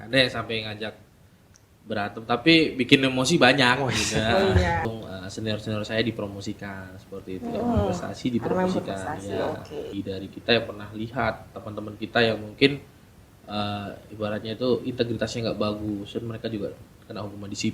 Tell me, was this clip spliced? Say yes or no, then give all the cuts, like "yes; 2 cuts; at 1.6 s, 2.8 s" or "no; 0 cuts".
yes; 2 cuts; at 4.8 s, 9.9 s